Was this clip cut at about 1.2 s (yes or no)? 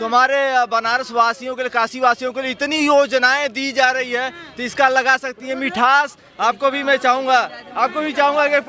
no